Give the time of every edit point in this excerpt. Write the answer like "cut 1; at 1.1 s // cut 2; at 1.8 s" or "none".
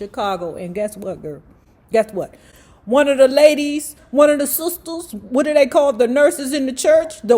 cut 1; at 4.0 s

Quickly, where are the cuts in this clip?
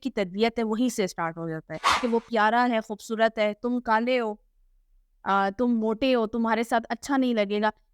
cut 1; at 1.9 s

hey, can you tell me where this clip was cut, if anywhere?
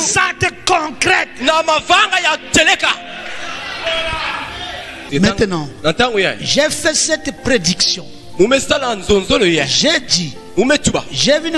cut 1; at 5.0 s

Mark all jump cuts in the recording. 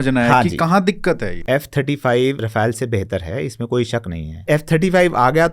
cut 1; at 1.3 s // cut 2; at 2.5 s // cut 3; at 4.4 s

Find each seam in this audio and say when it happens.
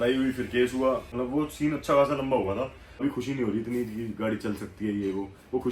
cut 1; at 1.1 s // cut 2; at 3.0 s

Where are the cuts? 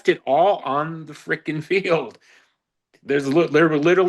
none

